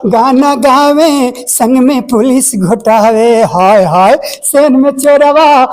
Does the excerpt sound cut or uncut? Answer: uncut